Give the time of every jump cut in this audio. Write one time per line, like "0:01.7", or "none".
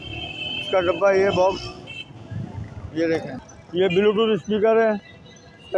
0:03.5